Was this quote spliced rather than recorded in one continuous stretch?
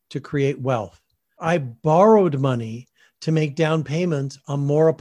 yes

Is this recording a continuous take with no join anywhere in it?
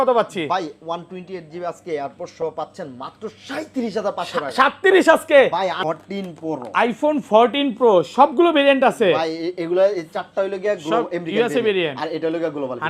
no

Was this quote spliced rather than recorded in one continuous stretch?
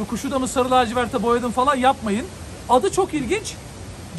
yes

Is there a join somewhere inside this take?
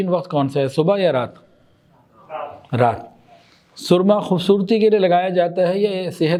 no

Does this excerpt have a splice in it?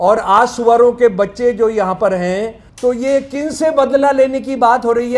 yes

